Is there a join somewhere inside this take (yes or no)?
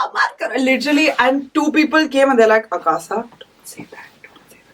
no